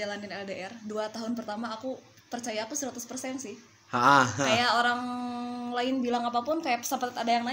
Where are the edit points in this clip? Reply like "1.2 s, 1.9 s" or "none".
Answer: none